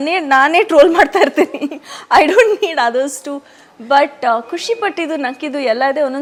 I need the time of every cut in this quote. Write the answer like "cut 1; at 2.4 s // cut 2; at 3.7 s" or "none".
none